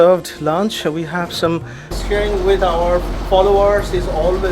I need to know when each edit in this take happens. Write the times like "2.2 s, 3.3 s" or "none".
1.9 s